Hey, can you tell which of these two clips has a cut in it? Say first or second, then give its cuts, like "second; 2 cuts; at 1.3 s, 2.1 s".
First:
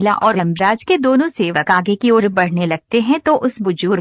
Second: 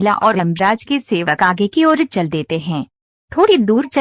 second; 1 cut; at 1.0 s